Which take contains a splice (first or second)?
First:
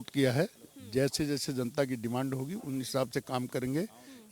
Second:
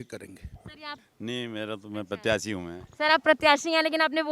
second